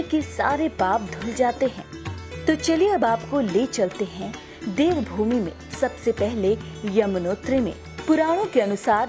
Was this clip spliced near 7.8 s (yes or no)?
no